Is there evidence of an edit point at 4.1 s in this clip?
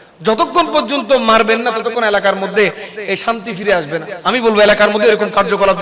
yes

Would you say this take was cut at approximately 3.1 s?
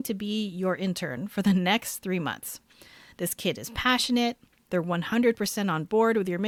no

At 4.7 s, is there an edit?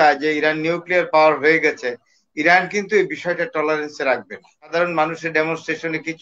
yes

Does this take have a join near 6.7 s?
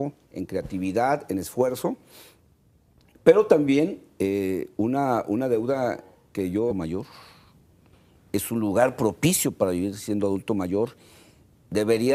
no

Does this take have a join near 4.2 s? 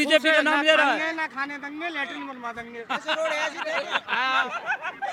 no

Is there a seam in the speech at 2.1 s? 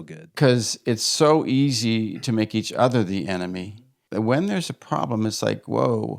no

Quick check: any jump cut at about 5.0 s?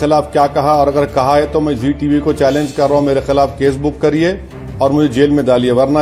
no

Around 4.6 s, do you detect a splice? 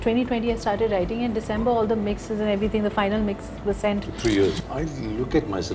yes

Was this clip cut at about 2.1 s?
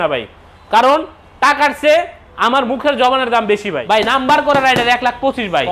no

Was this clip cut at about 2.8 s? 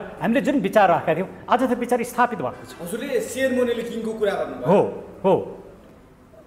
no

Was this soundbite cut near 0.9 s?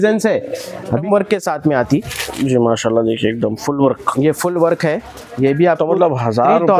yes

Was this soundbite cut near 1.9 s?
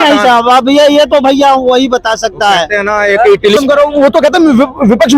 no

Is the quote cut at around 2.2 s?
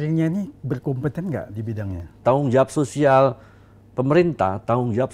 yes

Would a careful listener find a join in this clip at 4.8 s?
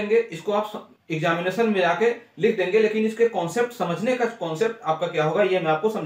no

